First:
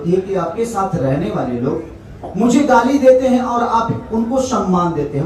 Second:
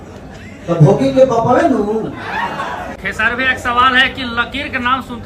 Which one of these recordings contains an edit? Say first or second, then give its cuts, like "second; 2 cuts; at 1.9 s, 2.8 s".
second; 1 cut; at 3.0 s